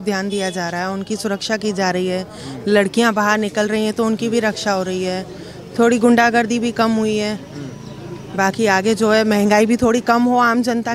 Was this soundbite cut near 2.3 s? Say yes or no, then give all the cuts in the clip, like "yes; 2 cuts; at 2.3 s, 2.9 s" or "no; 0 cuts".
no; 0 cuts